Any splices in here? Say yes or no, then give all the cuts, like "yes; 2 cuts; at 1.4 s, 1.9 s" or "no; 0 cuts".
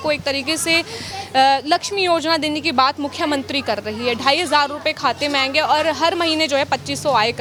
no; 0 cuts